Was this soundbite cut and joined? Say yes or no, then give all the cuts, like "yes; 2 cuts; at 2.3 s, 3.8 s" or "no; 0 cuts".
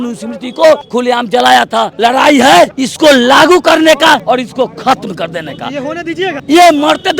yes; 5 cuts; at 0.9 s, 1.9 s, 2.8 s, 4.2 s, 6.4 s